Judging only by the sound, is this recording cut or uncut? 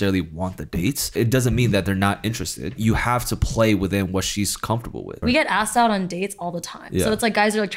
cut